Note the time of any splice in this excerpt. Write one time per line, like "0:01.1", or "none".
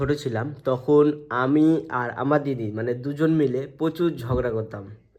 none